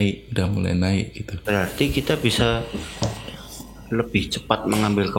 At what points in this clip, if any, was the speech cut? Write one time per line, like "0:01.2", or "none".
0:01.4